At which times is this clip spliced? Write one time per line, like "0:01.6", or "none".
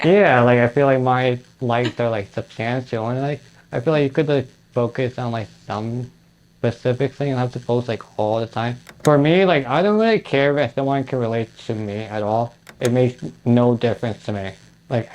0:08.8